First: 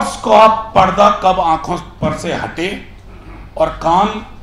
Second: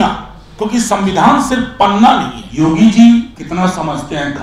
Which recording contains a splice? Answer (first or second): second